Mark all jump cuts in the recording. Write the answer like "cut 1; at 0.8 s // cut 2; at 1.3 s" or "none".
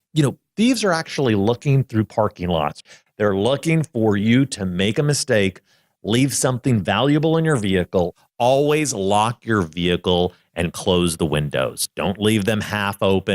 cut 1; at 2.8 s // cut 2; at 8.2 s